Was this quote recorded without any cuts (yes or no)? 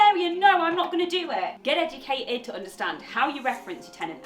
no